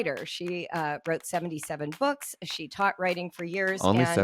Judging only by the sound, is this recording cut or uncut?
uncut